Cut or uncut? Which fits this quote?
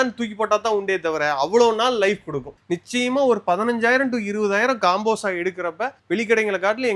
cut